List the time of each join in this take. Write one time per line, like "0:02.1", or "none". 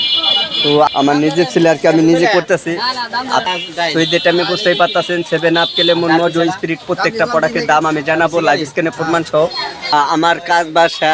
0:00.9
0:03.5
0:09.9